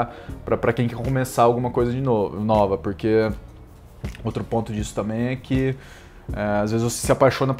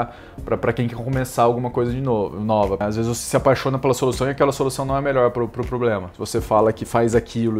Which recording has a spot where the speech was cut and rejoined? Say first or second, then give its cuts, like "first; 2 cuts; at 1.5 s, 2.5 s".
second; 2 cuts; at 2.8 s, 6.1 s